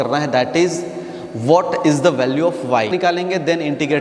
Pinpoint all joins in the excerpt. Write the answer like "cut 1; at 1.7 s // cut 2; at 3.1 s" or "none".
cut 1; at 2.9 s